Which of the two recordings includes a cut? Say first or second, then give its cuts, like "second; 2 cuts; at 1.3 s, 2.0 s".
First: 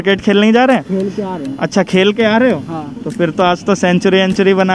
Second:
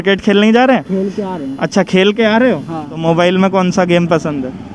second; 1 cut; at 2.9 s